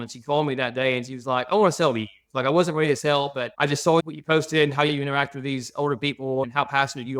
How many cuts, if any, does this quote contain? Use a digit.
0